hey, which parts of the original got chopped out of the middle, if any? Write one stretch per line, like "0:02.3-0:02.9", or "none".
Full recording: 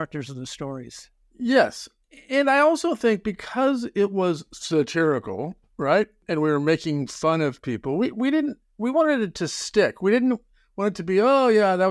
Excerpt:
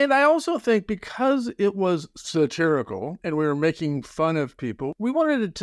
0:05.5-0:06.2
0:07.9-0:08.6